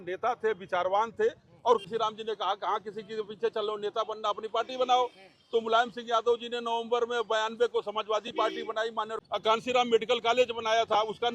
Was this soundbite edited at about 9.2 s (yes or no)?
yes